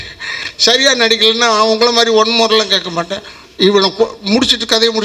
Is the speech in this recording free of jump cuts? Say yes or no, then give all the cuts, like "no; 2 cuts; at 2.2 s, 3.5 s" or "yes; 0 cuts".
yes; 0 cuts